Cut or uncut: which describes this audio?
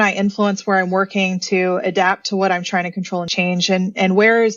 cut